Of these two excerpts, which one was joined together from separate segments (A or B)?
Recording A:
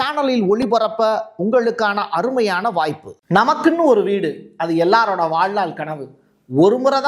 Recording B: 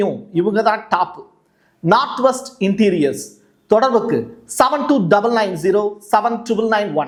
A